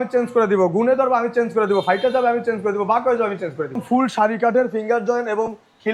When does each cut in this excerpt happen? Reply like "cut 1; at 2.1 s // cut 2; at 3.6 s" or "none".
cut 1; at 3.8 s